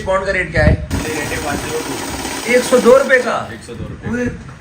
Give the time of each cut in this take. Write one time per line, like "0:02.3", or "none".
0:00.9